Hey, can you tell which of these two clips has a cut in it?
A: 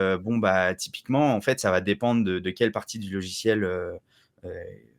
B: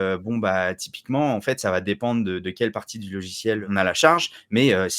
B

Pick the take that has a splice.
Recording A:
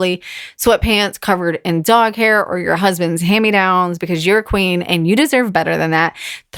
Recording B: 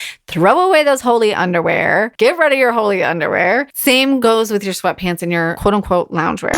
B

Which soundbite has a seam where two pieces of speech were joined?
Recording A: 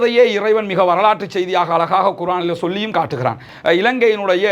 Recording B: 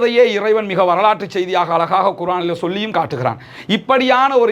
A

